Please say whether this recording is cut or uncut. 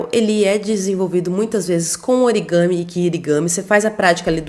uncut